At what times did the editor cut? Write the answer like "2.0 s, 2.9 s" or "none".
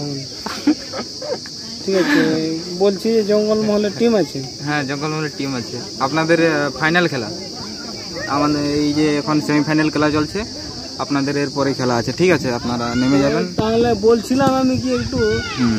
none